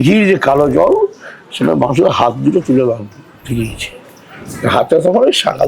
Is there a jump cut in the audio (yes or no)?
no